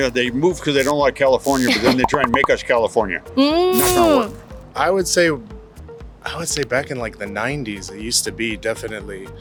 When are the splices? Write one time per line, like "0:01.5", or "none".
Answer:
none